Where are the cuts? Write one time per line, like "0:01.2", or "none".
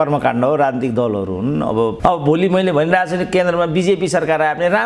0:02.0